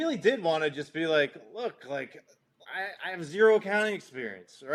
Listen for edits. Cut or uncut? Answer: uncut